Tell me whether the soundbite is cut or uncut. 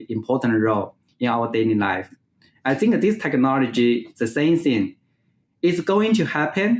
uncut